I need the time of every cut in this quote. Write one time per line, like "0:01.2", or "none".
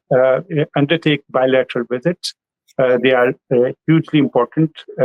none